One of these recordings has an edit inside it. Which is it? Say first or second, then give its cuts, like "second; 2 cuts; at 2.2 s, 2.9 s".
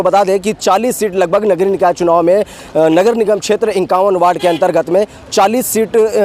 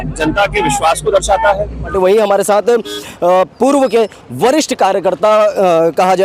second; 1 cut; at 1.9 s